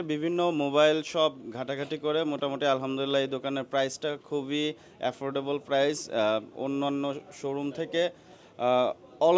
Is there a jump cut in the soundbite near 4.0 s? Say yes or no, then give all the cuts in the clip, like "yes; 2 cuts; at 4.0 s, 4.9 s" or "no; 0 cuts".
no; 0 cuts